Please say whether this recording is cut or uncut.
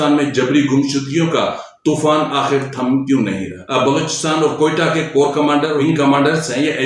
cut